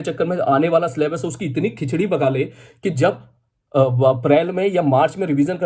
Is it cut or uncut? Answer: uncut